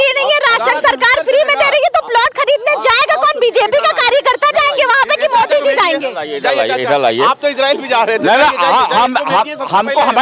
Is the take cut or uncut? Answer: uncut